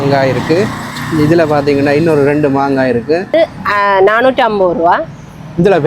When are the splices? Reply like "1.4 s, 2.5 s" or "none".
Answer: 3.3 s